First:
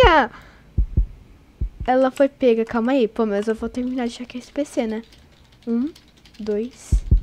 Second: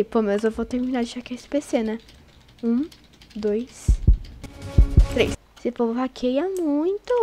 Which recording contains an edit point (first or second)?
second